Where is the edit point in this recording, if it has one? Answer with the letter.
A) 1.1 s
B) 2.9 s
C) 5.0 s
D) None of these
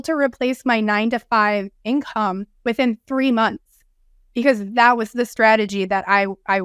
D